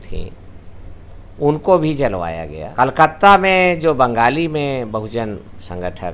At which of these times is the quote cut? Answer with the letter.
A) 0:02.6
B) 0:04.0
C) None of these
A